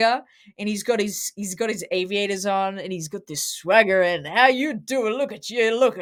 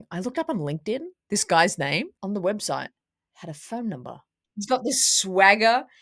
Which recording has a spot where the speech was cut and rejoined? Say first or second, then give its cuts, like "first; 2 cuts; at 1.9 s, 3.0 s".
second; 2 cuts; at 2.1 s, 4.7 s